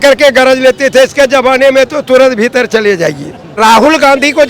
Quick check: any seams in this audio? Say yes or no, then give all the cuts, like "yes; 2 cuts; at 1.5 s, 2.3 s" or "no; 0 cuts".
yes; 1 cut; at 3.6 s